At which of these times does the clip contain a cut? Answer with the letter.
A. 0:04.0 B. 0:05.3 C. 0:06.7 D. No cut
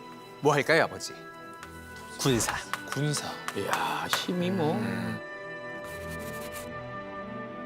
D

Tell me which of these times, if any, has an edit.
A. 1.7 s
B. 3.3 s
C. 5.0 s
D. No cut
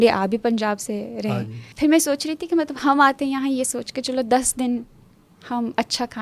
A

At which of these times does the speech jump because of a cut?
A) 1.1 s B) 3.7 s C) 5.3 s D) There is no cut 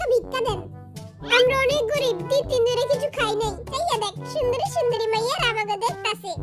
B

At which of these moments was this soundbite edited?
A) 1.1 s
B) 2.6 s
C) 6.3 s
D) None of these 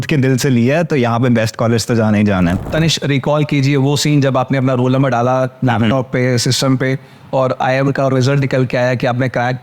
B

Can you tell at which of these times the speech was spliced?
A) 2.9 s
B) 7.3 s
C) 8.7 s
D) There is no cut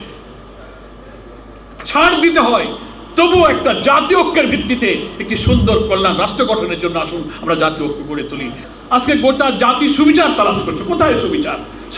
C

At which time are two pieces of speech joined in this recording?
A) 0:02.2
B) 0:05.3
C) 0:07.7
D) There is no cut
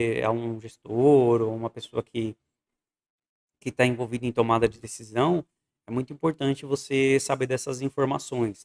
D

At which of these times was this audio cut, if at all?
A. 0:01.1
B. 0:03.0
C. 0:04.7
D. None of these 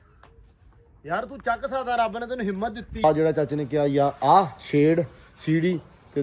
B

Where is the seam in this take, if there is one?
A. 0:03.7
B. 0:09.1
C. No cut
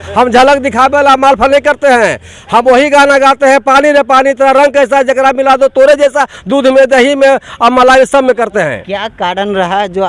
C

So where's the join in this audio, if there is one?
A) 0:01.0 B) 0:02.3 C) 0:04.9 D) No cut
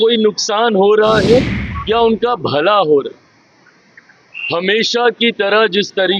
A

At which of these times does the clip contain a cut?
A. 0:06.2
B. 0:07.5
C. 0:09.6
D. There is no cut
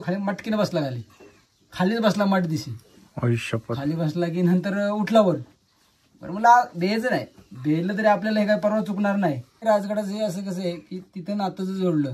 C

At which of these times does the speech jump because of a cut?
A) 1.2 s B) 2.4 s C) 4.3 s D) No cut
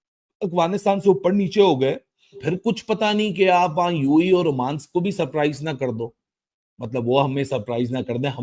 B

